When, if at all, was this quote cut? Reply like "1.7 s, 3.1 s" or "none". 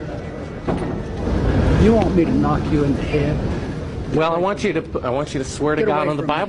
1.2 s